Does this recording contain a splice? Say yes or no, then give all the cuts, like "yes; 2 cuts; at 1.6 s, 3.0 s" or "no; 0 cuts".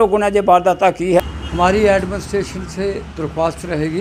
yes; 1 cut; at 1.3 s